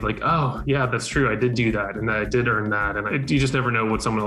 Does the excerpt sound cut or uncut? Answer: cut